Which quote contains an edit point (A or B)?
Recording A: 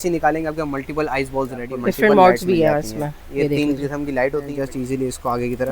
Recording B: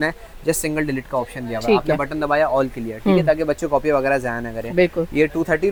A